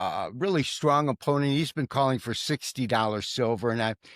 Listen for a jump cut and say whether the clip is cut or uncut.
uncut